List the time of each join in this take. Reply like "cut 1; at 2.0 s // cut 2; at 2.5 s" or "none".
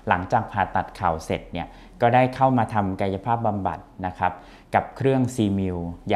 none